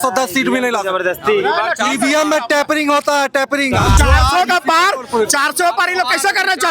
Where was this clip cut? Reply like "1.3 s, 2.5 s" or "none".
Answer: 3.9 s